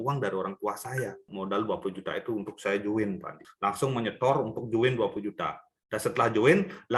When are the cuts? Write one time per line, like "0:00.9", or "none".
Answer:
0:01.3
0:03.4